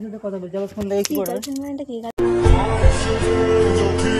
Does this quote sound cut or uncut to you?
uncut